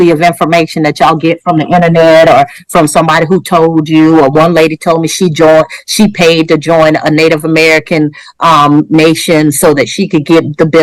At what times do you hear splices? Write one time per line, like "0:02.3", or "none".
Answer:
none

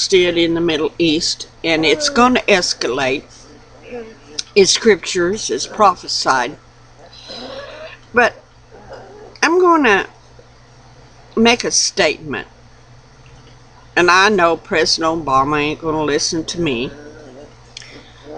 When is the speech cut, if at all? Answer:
0:16.9

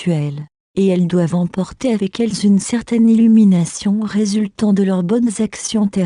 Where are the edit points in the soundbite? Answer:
0:01.0

